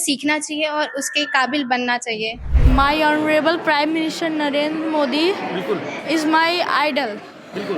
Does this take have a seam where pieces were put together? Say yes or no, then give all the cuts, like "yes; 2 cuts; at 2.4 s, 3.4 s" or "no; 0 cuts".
yes; 1 cut; at 2.5 s